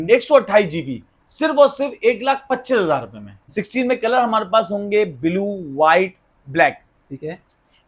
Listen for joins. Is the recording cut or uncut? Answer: cut